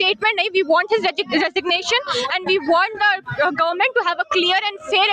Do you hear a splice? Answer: no; 0 cuts

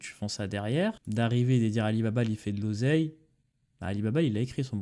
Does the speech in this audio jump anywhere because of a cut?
yes; 1 cut; at 1.0 s

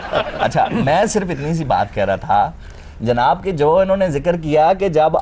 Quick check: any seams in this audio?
no; 0 cuts

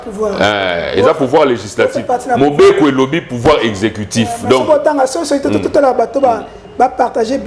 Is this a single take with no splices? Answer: yes; 0 cuts

